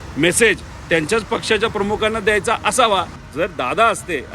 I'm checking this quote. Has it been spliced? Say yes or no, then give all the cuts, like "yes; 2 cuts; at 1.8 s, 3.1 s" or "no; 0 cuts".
yes; 1 cut; at 3.2 s